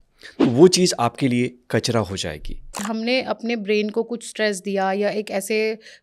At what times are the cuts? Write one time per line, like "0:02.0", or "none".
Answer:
0:02.8